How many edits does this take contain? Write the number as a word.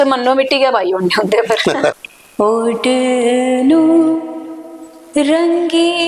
one